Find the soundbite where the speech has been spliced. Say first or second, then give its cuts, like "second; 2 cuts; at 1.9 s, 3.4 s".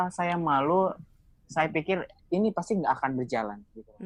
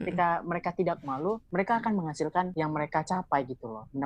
second; 2 cuts; at 1.4 s, 2.5 s